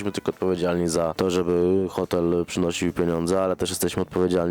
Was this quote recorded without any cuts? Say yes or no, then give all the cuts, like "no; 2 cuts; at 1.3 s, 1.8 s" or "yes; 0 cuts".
no; 1 cut; at 1.1 s